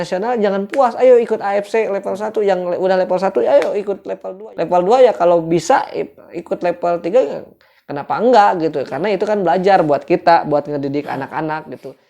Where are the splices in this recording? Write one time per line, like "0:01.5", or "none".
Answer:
0:04.2

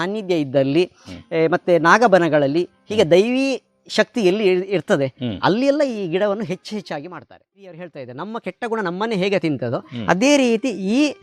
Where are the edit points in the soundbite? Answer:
0:07.6

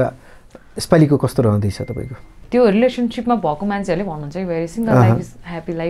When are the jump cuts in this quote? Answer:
0:02.4

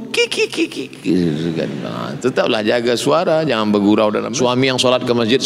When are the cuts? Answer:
0:04.2

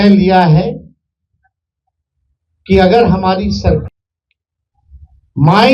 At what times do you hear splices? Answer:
0:03.8

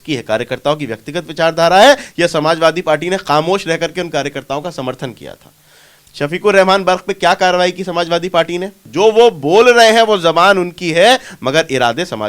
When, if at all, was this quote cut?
0:08.8

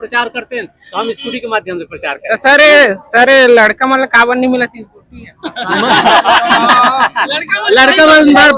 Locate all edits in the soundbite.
none

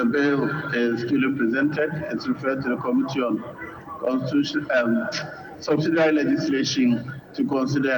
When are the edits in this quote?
none

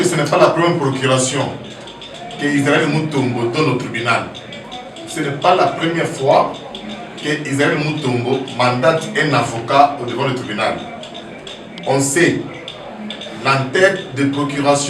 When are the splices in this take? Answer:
none

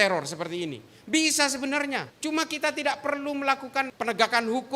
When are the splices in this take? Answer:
0:02.1
0:03.9

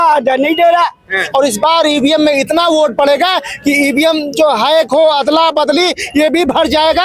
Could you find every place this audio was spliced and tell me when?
0:01.2

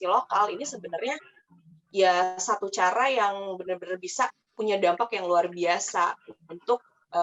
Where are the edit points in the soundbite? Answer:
none

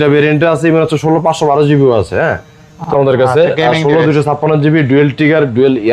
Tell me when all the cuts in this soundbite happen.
0:02.9

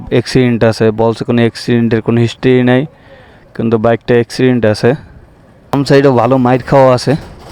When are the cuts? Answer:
0:05.7

